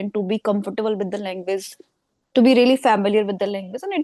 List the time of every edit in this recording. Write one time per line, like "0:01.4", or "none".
none

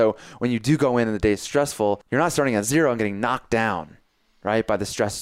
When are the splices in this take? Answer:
0:02.0

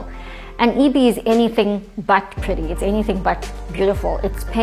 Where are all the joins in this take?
none

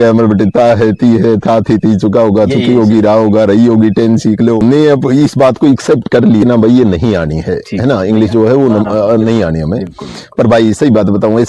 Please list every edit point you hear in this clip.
0:04.6
0:06.4

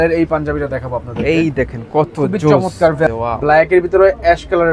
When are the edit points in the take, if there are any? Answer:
0:03.1

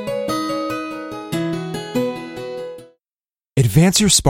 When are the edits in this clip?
0:02.8

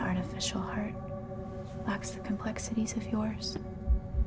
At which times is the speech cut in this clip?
none

